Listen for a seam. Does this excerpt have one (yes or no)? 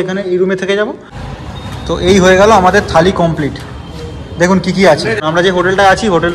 yes